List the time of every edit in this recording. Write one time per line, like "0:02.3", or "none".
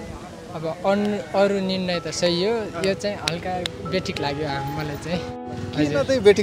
0:05.4